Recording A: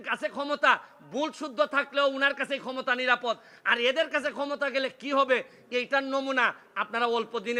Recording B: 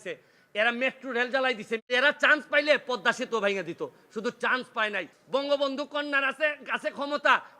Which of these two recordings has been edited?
B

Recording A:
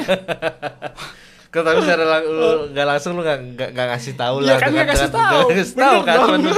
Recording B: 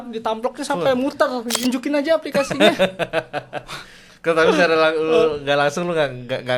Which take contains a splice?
B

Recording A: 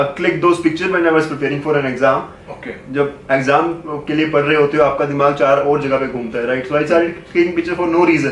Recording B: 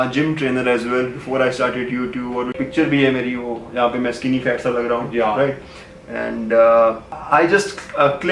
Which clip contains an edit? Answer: B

